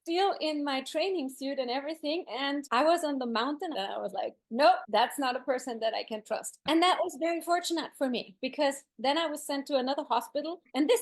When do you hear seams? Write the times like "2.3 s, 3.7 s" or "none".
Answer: 3.7 s

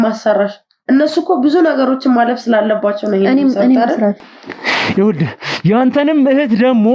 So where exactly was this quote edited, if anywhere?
4.2 s

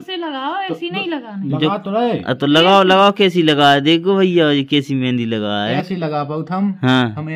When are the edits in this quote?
5.8 s

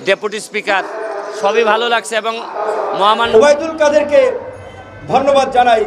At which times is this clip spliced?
3.3 s

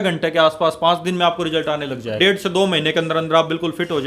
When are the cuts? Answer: 2.2 s

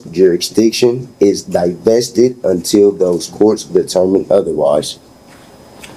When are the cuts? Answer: none

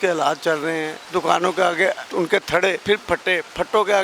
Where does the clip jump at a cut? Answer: 1.0 s, 2.0 s, 2.8 s

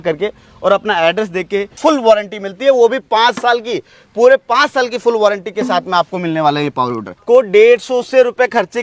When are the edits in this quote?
1.7 s, 7.0 s

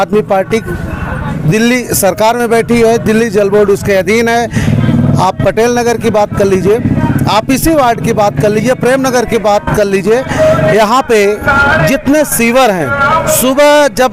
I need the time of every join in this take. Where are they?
none

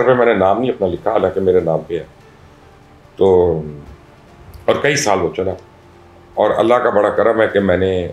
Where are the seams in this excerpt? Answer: none

